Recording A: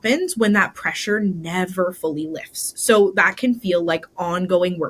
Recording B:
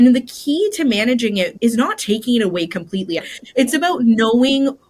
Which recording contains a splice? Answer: B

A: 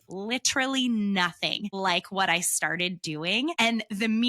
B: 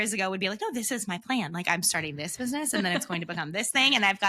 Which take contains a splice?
A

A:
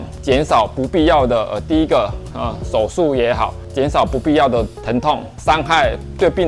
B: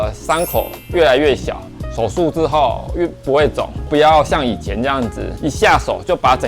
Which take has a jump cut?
B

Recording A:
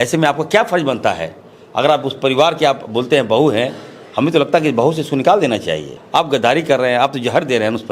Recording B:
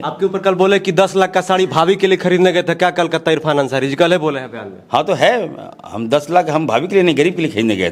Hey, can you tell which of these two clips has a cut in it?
A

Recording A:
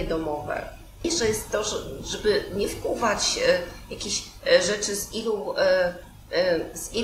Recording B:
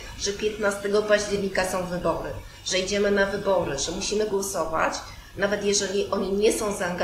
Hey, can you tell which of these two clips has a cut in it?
A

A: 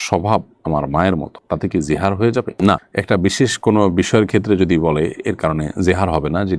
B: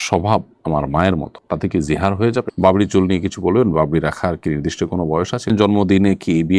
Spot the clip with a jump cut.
B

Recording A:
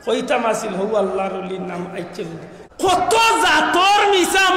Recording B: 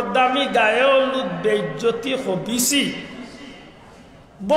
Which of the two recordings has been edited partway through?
A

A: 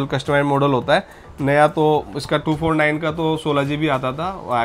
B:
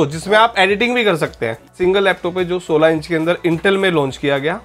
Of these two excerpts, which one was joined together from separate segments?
B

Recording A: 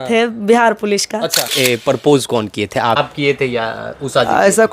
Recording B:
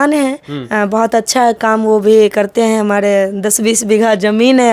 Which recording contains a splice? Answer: A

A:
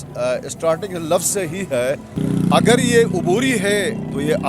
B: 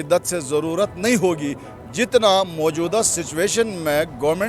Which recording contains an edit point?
A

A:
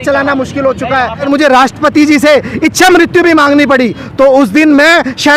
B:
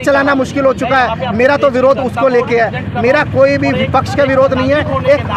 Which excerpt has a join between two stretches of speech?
A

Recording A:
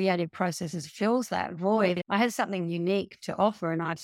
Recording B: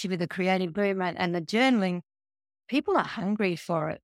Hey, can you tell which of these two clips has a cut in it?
A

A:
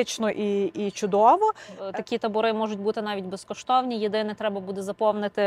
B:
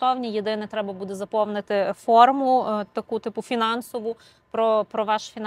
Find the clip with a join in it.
A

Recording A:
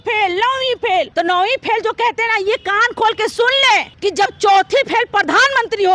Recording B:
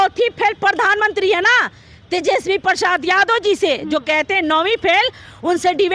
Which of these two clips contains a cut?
A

